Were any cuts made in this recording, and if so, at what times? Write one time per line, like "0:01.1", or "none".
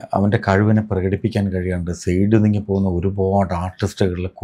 none